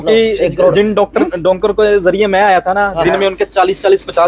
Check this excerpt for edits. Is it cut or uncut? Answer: uncut